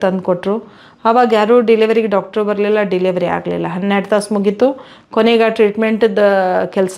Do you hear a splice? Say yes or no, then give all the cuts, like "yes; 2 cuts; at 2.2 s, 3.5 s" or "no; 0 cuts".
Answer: no; 0 cuts